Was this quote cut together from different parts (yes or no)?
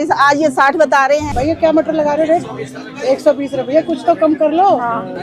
yes